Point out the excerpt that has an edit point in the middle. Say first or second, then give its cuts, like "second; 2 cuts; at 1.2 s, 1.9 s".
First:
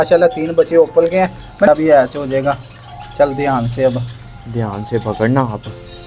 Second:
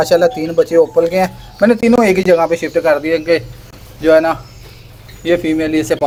first; 1 cut; at 1.7 s